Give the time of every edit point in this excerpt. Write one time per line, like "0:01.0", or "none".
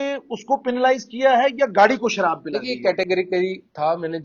none

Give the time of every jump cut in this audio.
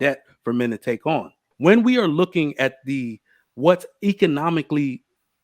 0:01.5

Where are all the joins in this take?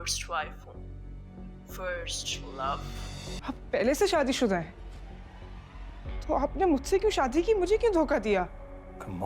0:03.4

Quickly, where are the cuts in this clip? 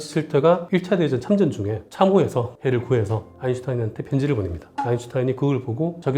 0:02.6

